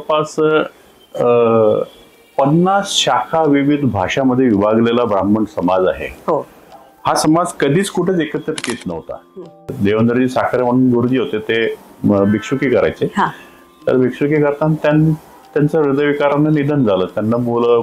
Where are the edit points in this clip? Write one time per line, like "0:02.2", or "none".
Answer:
0:09.8